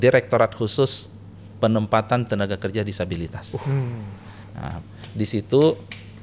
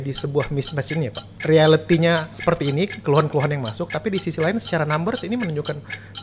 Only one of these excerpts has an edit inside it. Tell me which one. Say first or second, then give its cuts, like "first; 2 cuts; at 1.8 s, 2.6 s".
second; 2 cuts; at 1.3 s, 2.3 s